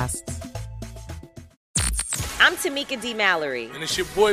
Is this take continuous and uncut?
no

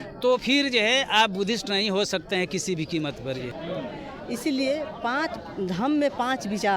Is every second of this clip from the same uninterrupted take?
no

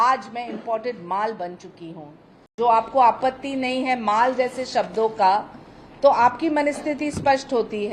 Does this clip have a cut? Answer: yes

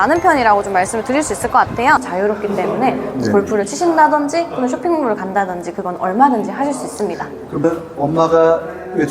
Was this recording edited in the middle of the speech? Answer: yes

